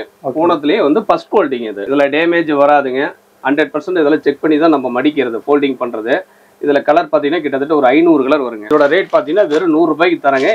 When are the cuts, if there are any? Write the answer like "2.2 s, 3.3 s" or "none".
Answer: 1.7 s, 8.6 s

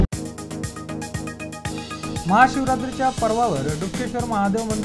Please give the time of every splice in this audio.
1.1 s, 2.2 s

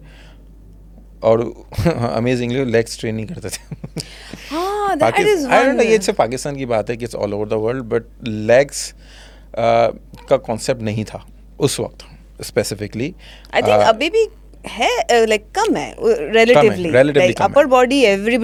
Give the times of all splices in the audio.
none

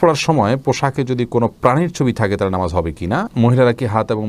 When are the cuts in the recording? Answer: 3.3 s

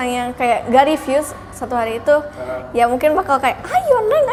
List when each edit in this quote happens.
none

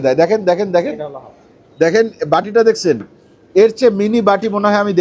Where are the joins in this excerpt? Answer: none

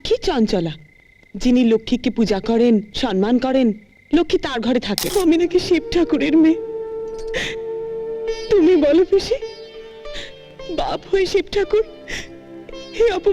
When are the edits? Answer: 5.1 s

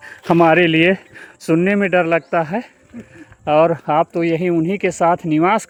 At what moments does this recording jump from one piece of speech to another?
none

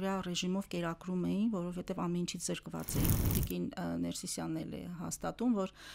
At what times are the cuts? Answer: 3.3 s

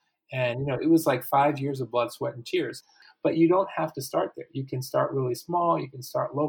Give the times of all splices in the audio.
2.9 s

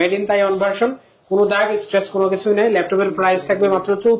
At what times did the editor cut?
none

